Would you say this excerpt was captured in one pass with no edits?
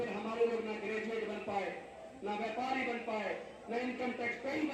yes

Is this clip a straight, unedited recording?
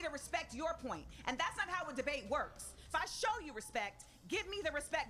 no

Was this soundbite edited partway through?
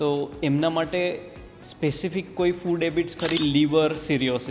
yes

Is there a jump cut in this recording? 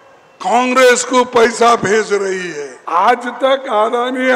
yes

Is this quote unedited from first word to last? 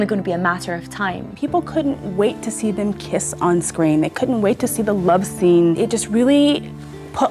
no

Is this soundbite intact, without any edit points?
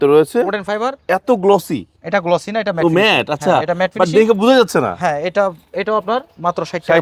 yes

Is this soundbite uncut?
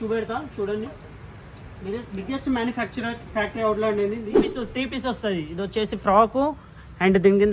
no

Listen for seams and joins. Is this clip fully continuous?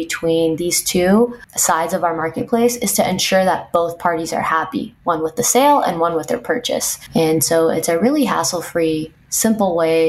no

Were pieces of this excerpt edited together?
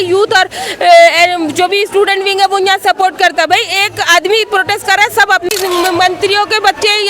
yes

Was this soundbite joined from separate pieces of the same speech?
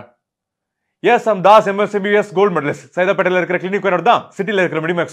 no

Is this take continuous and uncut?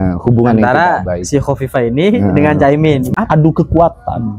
no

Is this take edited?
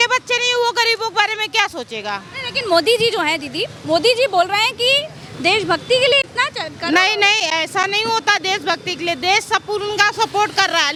no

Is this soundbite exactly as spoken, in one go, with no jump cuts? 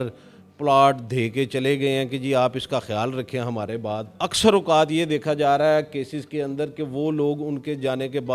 no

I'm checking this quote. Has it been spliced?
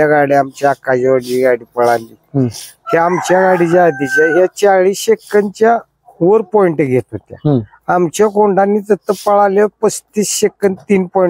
no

